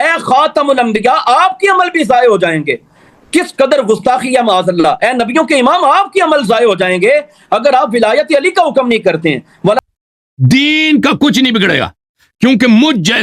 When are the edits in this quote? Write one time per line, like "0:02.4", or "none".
0:09.8